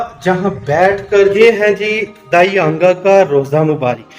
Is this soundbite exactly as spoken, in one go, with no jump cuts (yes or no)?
no